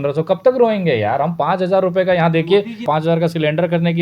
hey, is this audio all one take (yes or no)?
no